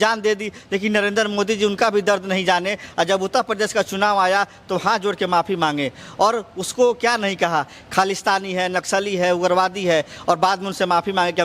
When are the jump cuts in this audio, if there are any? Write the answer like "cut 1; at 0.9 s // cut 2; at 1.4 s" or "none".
none